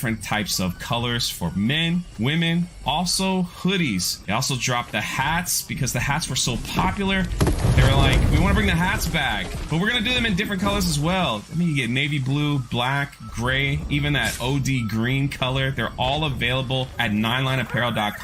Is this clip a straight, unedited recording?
yes; 0 cuts

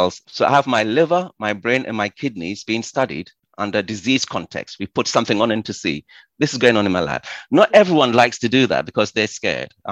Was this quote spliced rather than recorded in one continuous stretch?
no; 0 cuts

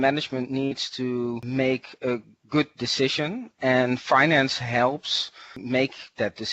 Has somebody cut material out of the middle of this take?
yes; 2 cuts; at 1.4 s, 5.6 s

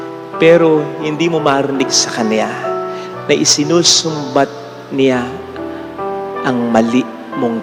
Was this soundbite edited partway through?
no; 0 cuts

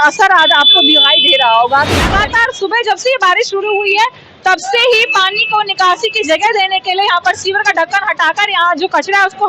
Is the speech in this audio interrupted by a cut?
yes; 1 cut; at 2.0 s

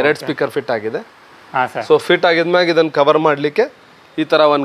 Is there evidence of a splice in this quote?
no; 0 cuts

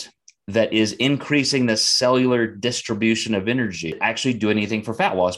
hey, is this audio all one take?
no; 1 cut; at 4.0 s

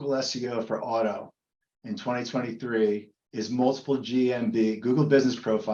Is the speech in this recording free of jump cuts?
yes; 0 cuts

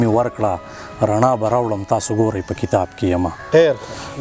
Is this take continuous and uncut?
yes; 0 cuts

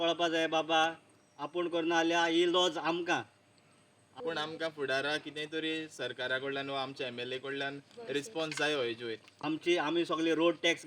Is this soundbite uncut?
no; 2 cuts; at 4.0 s, 9.3 s

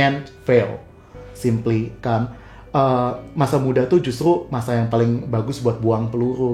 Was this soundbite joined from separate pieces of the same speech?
no; 0 cuts

